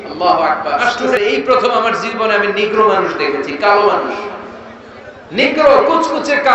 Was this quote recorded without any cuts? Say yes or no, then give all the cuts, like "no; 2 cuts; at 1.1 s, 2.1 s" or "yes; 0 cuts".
no; 1 cut; at 1.2 s